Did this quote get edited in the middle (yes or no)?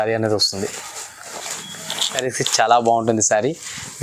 yes